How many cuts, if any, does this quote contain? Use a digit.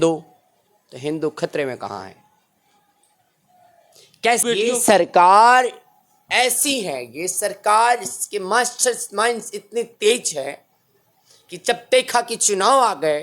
1